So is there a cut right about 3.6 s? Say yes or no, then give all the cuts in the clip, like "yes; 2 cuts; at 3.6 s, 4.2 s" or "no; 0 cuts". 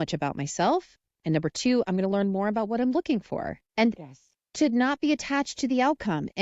yes; 1 cut; at 3.6 s